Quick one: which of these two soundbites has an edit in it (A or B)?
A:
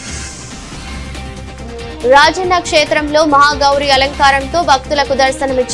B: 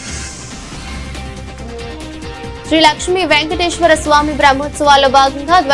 A